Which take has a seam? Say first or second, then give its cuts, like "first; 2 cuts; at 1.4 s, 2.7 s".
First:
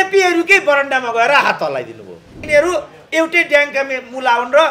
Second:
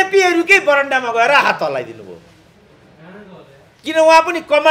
first; 1 cut; at 2.4 s